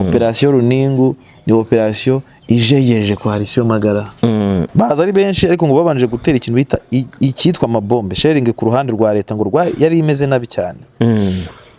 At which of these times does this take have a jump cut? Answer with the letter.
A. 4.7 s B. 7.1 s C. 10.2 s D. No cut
A